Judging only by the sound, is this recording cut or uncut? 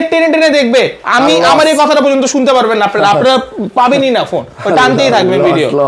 uncut